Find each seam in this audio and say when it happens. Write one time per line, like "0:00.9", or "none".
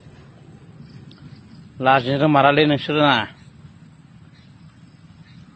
none